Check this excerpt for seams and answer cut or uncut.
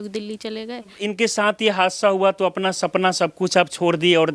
cut